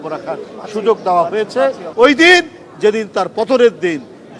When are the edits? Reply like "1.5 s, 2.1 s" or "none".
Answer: 1.8 s